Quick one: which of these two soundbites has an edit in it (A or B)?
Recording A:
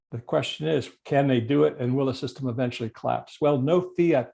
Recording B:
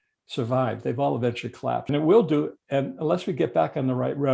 B